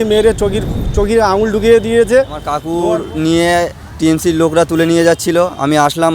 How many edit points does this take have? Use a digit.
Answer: 1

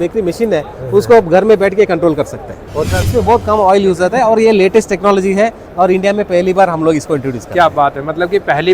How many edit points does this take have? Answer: 1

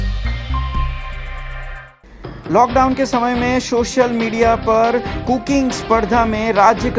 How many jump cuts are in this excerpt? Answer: 1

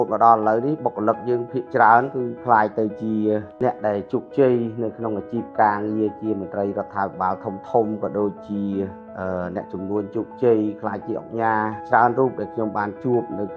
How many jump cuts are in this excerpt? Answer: 0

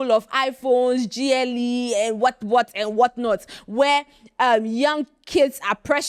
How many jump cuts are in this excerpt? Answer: 0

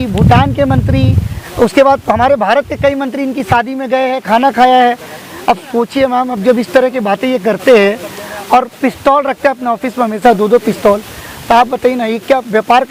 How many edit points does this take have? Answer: 0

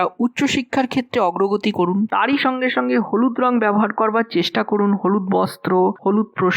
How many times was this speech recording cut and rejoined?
1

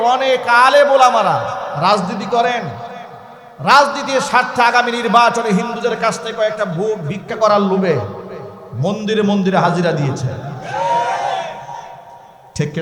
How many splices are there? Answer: 0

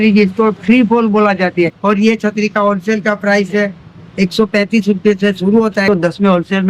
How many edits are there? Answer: 2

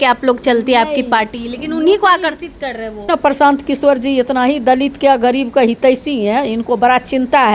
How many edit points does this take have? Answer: 1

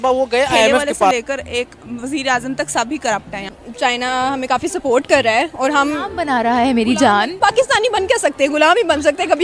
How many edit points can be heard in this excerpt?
3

